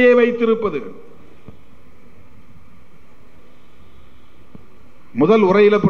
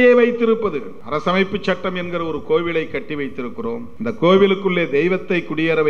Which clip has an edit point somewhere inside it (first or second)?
second